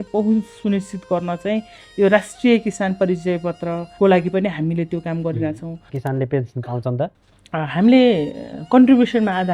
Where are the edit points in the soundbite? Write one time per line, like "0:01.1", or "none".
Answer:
0:03.9
0:06.0